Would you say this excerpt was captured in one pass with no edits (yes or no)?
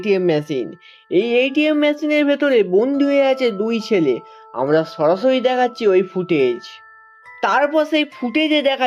yes